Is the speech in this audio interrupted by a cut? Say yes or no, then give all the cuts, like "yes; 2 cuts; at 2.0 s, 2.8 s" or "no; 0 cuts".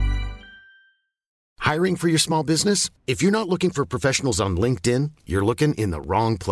yes; 1 cut; at 1.5 s